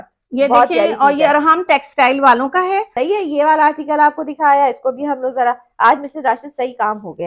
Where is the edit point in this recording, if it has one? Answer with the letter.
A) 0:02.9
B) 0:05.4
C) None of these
A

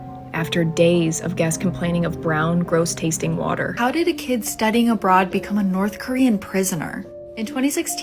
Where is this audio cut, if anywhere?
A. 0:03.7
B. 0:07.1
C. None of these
A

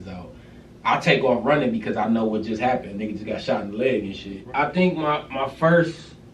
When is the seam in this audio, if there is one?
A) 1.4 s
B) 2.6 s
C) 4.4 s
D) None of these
C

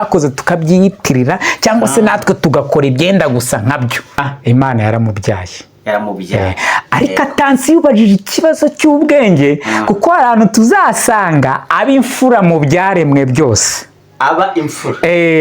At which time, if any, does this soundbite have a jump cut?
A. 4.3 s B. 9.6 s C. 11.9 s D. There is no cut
A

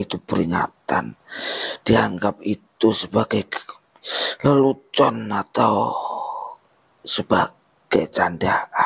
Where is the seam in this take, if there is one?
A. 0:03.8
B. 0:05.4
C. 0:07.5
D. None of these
D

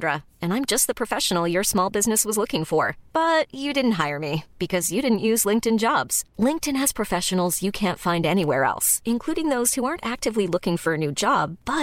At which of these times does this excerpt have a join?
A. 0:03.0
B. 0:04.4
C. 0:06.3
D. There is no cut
D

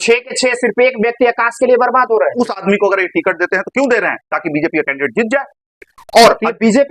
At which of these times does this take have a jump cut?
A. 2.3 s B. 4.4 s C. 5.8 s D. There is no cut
A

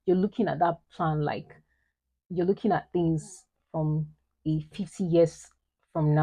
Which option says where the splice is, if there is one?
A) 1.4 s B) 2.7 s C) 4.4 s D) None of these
D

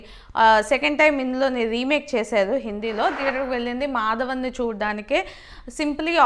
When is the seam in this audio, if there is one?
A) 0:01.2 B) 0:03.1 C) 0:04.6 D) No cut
B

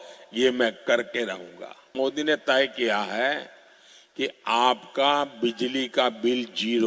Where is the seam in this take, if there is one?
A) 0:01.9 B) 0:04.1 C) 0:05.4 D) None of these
A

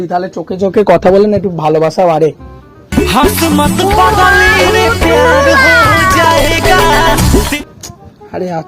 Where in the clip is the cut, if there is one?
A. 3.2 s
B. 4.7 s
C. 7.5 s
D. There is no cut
C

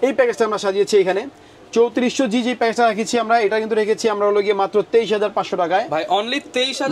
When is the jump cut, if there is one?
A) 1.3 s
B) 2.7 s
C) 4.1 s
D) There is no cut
D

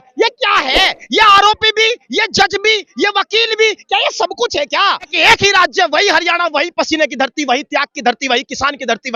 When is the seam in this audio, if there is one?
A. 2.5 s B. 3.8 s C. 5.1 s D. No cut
C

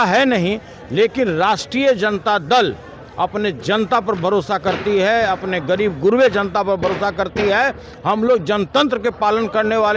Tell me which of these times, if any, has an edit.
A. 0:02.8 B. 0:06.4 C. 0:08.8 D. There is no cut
D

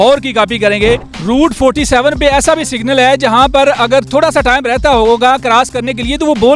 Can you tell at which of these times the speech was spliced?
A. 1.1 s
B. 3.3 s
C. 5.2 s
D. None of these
A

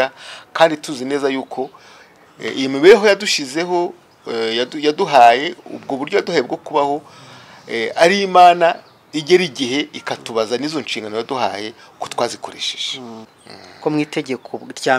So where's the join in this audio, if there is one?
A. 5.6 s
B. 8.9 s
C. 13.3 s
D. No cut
C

